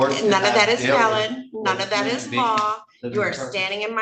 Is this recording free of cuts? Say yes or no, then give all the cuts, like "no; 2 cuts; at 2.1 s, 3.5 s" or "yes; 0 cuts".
yes; 0 cuts